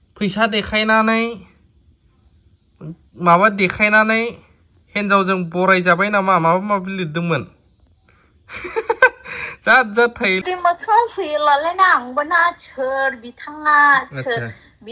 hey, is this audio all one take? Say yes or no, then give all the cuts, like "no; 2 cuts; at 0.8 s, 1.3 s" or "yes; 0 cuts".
no; 1 cut; at 10.4 s